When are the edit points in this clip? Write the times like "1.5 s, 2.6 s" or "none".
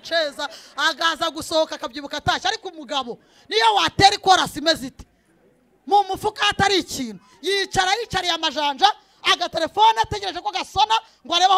none